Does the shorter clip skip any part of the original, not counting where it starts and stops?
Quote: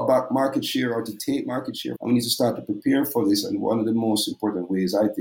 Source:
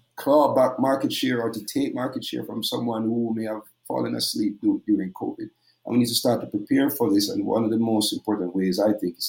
yes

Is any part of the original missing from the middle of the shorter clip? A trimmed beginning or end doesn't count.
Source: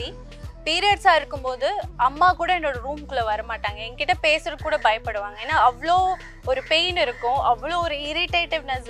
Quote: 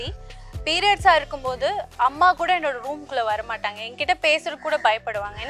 no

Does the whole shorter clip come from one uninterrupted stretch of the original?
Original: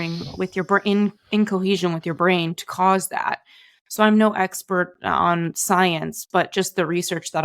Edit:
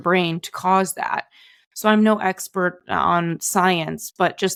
yes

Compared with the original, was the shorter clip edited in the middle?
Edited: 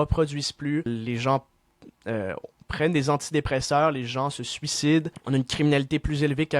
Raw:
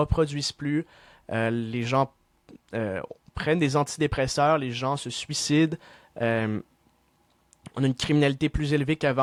yes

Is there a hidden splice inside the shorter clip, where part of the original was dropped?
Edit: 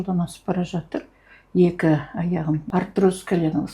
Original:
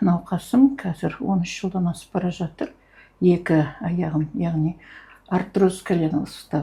yes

